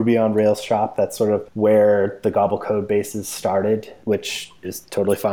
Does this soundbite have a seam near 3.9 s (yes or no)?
yes